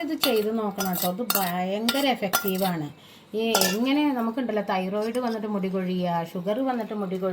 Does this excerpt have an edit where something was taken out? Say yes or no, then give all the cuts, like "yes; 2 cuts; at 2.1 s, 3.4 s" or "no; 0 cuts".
no; 0 cuts